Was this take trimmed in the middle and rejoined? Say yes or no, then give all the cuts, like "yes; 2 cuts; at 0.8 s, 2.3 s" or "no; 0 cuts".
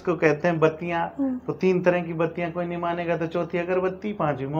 no; 0 cuts